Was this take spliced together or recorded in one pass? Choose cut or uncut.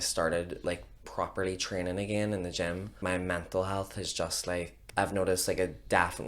cut